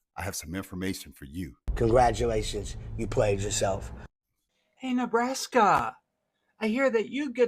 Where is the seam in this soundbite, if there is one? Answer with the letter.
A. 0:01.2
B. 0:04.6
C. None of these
B